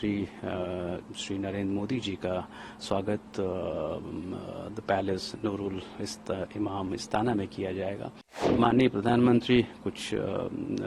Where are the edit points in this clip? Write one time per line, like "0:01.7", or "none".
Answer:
0:08.5